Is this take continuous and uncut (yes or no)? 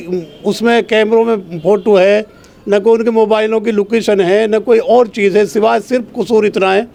yes